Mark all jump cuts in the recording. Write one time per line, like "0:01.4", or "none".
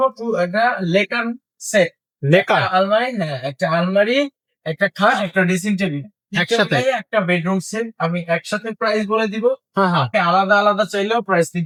none